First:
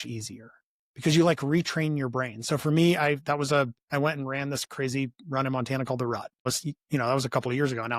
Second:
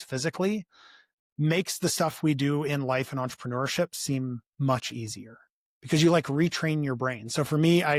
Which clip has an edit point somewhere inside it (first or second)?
first